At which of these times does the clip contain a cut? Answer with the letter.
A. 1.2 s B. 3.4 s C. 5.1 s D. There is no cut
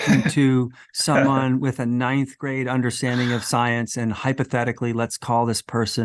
D